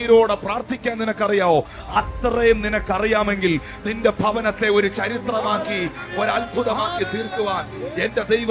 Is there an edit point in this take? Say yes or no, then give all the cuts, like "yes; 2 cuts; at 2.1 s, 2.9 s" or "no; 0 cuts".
no; 0 cuts